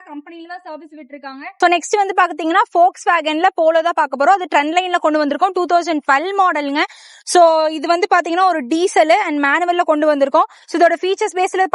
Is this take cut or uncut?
cut